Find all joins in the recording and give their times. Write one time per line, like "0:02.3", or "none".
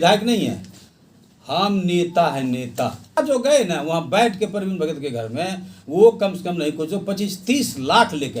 0:03.2